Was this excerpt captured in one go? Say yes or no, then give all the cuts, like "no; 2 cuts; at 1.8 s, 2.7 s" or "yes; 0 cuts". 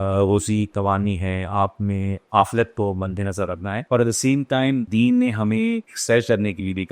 no; 3 cuts; at 3.7 s, 4.9 s, 5.9 s